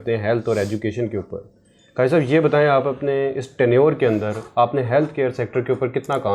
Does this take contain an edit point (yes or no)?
no